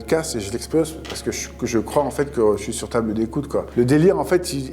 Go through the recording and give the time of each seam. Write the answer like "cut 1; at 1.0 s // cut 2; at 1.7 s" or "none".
none